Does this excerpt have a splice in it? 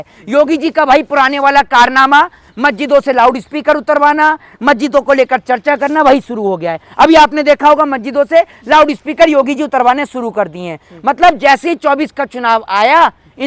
no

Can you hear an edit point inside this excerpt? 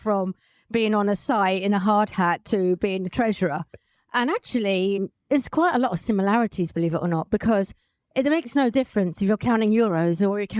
no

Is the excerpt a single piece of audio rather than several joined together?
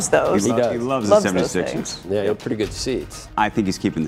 no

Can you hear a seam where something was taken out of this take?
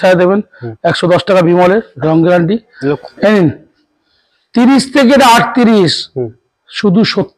yes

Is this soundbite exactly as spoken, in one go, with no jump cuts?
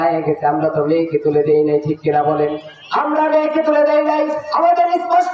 yes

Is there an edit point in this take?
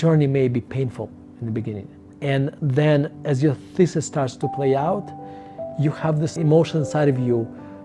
no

